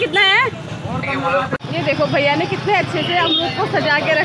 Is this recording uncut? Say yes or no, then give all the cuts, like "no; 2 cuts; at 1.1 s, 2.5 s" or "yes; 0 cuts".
no; 1 cut; at 1.6 s